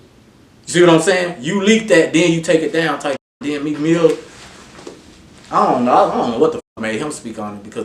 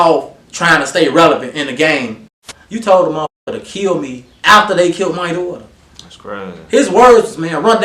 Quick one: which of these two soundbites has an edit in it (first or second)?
second